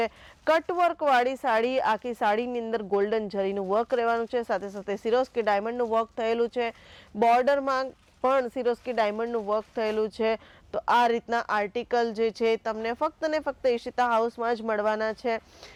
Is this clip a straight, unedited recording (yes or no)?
yes